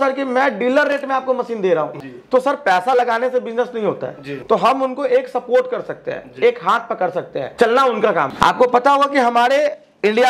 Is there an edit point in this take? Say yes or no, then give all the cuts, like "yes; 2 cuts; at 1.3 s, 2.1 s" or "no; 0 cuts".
yes; 4 cuts; at 2.0 s, 4.3 s, 7.4 s, 8.3 s